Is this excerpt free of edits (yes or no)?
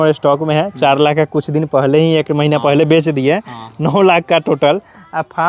yes